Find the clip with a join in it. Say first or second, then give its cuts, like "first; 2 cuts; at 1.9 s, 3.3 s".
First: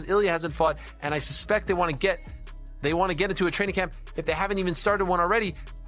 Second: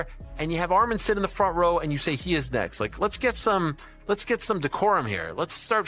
second; 1 cut; at 3.9 s